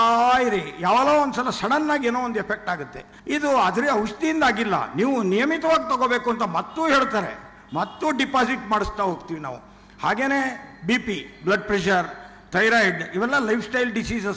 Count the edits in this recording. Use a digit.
0